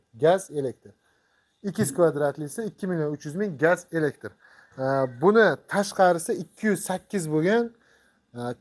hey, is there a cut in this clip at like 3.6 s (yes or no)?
no